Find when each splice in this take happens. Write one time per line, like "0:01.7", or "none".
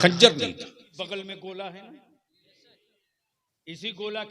0:00.9